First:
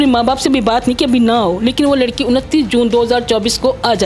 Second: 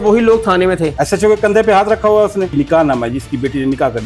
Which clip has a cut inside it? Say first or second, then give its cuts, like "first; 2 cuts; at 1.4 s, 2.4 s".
second; 2 cuts; at 0.9 s, 2.6 s